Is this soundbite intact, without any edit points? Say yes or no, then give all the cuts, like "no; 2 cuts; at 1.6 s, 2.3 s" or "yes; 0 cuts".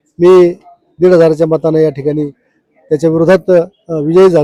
yes; 0 cuts